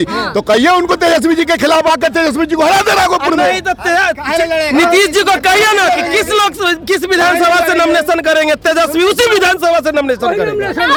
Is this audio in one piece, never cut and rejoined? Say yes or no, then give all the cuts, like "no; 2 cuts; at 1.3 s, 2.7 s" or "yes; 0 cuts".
yes; 0 cuts